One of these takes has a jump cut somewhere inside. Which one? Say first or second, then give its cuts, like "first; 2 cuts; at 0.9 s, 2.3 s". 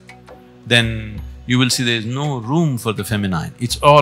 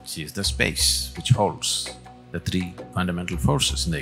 second; 1 cut; at 2.8 s